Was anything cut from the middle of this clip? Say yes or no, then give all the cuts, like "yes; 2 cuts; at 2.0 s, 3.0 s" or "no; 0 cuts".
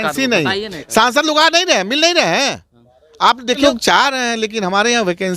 yes; 1 cut; at 3.6 s